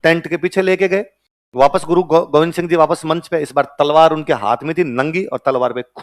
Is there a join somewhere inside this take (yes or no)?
no